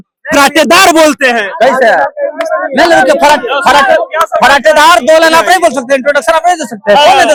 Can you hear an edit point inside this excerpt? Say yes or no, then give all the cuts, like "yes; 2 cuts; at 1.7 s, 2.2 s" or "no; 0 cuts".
no; 0 cuts